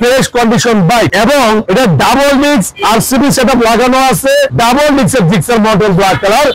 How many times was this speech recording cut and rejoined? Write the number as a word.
one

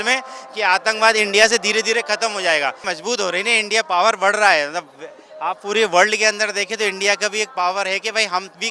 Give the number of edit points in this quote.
one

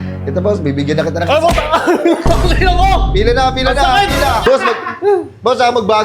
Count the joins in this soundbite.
one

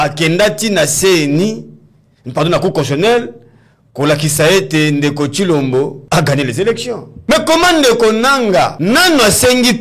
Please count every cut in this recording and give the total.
three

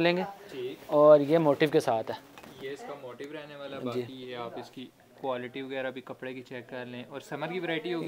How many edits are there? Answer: zero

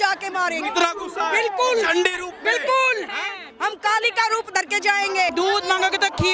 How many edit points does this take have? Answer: one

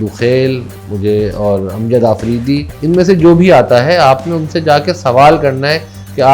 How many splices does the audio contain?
one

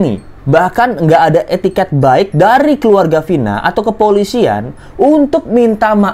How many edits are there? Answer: zero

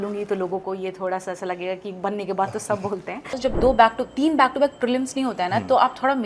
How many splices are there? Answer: one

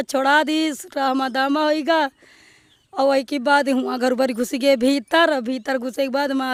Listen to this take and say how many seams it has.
zero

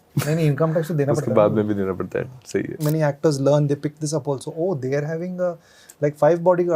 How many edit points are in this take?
one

